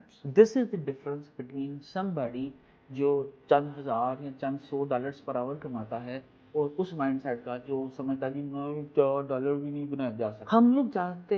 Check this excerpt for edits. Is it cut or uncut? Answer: cut